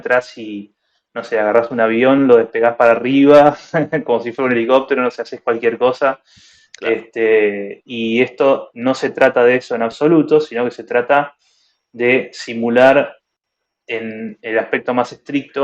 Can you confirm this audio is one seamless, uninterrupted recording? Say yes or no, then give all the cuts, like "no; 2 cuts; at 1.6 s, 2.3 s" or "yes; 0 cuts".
yes; 0 cuts